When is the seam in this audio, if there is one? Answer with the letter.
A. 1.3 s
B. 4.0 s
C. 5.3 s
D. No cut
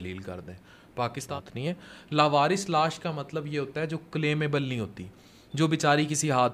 A